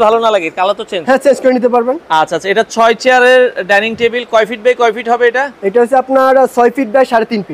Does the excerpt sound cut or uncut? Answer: uncut